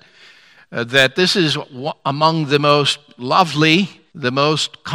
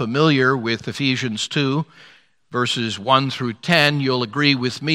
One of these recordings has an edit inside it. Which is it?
first; 1 cut; at 4.0 s

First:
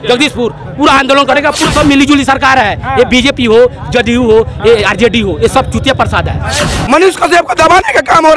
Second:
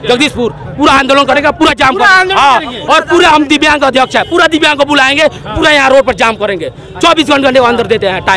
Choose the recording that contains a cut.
first; 2 cuts; at 1.7 s, 6.7 s

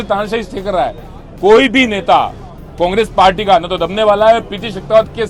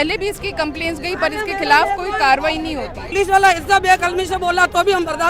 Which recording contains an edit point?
second; 1 cut; at 3.1 s

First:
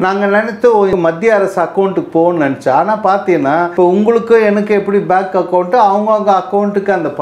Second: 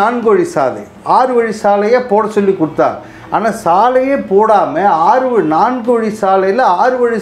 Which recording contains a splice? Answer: first; 2 cuts; at 0.9 s, 3.7 s

